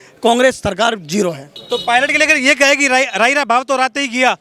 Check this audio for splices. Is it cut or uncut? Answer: cut